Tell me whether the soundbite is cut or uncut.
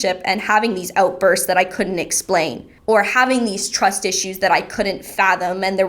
cut